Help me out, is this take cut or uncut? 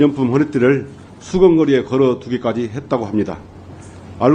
uncut